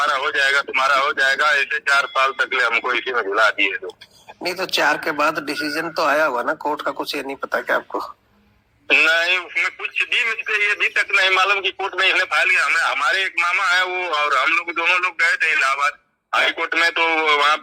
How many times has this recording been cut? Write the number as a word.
zero